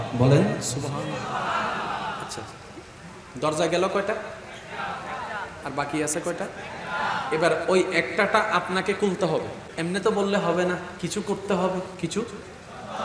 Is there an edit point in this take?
yes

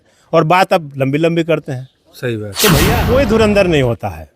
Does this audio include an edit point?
yes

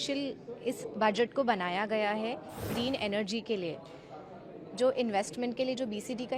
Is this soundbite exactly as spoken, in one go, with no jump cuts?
no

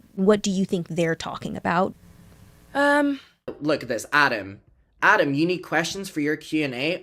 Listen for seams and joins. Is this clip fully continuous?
no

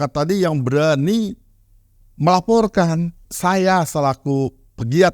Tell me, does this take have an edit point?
yes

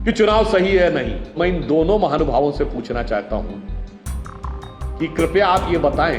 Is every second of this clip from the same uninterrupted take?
no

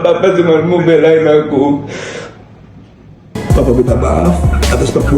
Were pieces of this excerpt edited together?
yes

